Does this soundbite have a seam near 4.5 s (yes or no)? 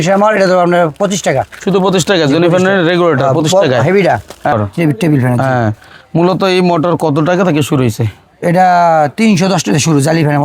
yes